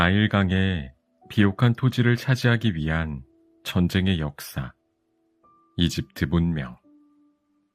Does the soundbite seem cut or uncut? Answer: cut